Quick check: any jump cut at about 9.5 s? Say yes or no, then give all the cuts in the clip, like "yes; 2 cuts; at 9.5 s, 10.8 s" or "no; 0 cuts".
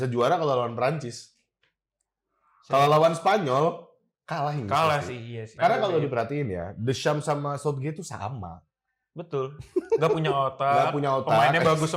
no; 1 cut; at 5.5 s